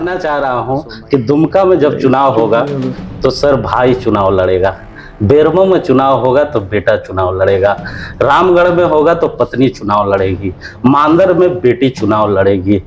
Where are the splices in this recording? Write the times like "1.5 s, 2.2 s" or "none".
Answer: none